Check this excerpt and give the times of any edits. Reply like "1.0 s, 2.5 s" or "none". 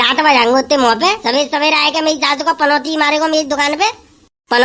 1.2 s